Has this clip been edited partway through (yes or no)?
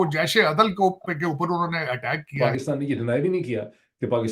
yes